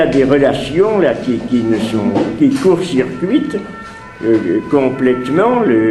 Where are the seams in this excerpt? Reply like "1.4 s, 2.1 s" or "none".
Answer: 1.9 s